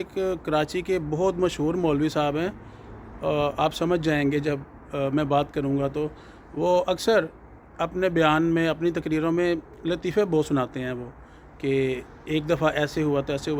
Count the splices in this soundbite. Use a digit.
0